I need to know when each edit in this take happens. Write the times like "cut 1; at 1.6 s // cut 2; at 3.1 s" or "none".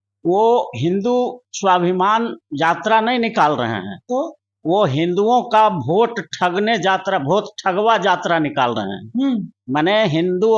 none